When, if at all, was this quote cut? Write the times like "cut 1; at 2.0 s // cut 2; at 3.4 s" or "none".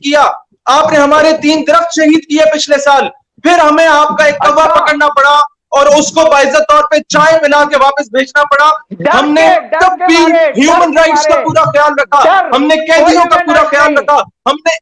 none